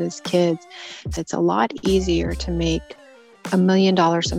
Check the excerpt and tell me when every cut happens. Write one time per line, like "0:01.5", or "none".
0:01.1